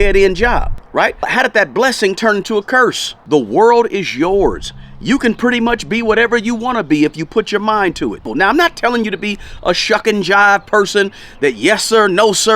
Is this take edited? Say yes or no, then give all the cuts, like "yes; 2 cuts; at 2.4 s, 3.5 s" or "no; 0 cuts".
yes; 3 cuts; at 0.9 s, 3.1 s, 8.2 s